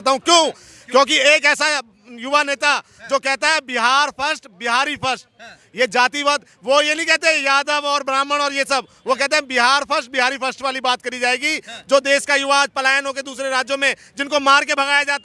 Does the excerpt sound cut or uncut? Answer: uncut